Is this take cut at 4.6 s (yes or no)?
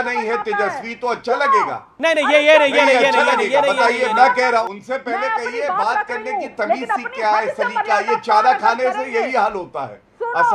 yes